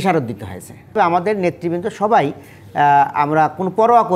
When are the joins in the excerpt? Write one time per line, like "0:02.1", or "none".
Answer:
0:00.9